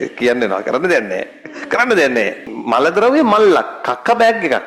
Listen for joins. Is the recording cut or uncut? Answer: cut